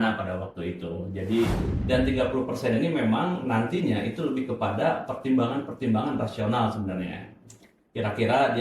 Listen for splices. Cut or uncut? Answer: cut